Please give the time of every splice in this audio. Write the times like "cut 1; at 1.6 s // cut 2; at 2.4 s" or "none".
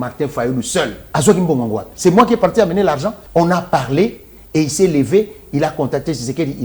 cut 1; at 1.0 s // cut 2; at 3.1 s